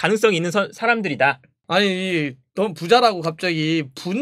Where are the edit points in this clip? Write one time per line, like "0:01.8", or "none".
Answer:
0:01.6